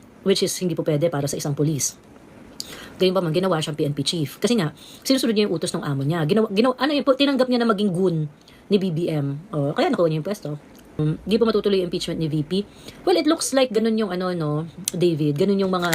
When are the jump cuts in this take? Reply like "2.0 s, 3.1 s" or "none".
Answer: 11.0 s